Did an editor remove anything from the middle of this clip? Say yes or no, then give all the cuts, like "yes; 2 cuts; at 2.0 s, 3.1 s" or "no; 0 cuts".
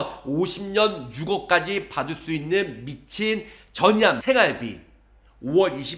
yes; 1 cut; at 4.2 s